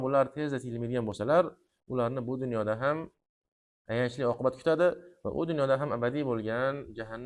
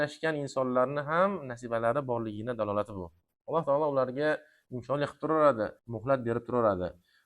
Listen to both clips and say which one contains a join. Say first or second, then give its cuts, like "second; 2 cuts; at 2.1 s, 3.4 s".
second; 1 cut; at 5.9 s